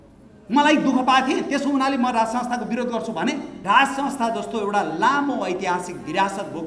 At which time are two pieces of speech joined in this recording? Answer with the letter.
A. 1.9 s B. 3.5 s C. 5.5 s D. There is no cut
B